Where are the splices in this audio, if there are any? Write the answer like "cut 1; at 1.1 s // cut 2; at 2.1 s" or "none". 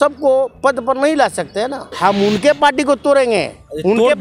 cut 1; at 1.9 s